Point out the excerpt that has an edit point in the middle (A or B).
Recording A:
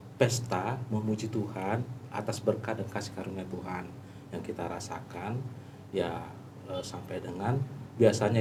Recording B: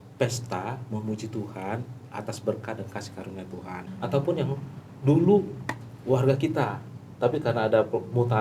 B